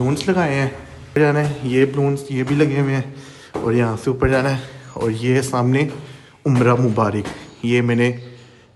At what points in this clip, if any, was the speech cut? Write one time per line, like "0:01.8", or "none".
0:01.2